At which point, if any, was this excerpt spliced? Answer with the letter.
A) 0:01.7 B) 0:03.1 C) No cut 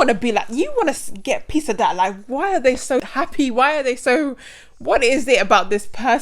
B